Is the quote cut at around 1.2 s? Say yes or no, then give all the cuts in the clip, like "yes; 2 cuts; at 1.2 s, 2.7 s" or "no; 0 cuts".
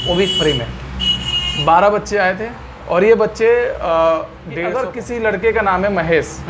no; 1 cut; at 4.6 s